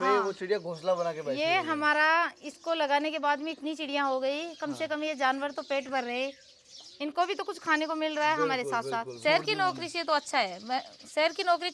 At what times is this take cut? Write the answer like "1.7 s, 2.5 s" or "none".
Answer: 9.1 s

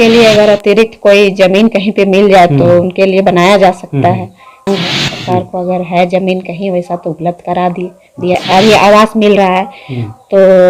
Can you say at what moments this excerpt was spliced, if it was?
4.7 s, 8.4 s

